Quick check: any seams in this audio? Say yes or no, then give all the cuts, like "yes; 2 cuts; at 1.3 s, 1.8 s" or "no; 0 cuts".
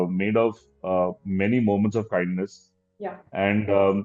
no; 0 cuts